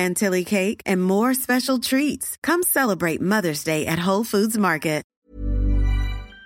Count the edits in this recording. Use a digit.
1